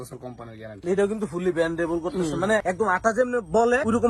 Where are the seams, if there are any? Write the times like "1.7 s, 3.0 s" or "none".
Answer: none